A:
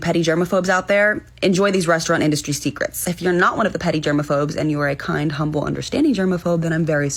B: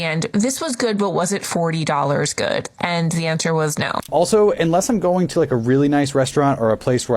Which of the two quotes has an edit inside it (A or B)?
B